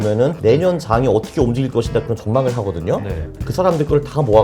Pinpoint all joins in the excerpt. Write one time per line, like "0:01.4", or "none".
0:03.3